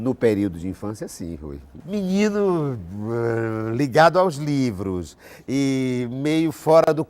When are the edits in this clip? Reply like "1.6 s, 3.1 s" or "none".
1.7 s

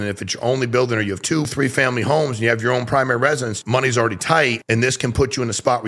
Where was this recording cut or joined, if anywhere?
1.5 s, 3.5 s, 4.6 s

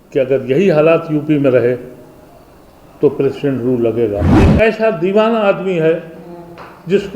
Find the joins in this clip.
4.4 s

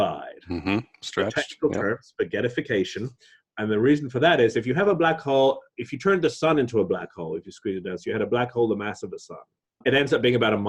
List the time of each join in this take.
9.8 s

